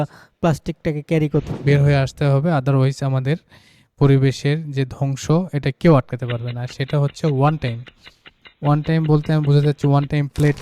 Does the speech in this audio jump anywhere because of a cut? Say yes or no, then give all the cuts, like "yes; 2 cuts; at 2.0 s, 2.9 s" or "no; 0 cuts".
yes; 1 cut; at 1.5 s